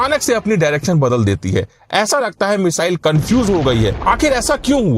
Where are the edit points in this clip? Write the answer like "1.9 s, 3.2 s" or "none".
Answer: 4.0 s